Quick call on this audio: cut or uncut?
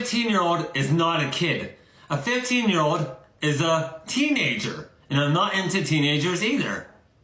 uncut